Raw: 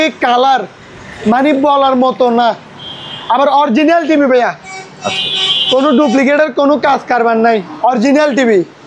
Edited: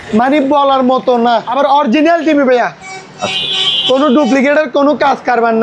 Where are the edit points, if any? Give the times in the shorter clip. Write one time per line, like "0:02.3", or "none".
0:01.5